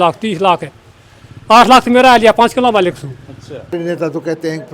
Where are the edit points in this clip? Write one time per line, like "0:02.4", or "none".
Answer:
0:03.7